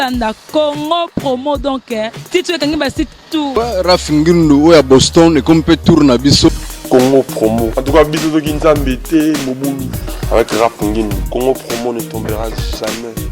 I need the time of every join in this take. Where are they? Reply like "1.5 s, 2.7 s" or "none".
3.5 s, 6.7 s